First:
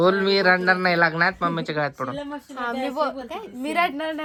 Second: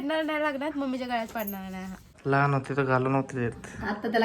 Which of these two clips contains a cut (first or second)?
second